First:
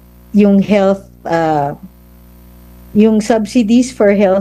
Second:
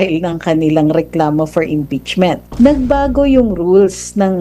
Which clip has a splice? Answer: second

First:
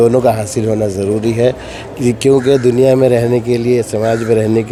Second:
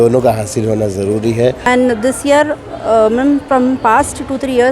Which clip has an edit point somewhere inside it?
second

